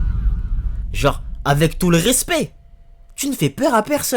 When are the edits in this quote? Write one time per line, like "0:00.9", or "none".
none

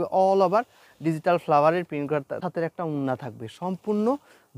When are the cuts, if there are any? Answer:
0:02.4

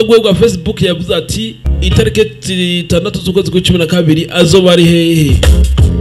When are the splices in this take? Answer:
0:02.0

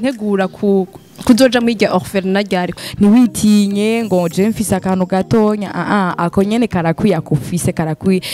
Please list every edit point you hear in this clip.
0:02.8

